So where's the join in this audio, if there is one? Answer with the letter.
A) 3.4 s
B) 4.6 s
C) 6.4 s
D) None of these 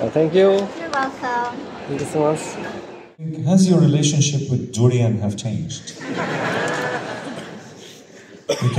A